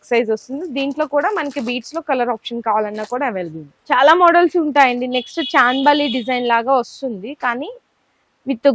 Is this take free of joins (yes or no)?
yes